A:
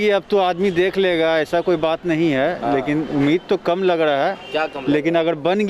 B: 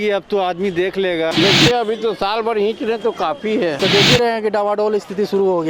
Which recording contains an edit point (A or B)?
B